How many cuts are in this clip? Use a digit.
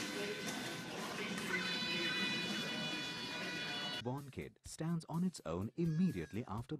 0